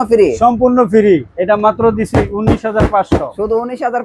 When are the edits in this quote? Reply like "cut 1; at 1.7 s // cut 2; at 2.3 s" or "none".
cut 1; at 1.3 s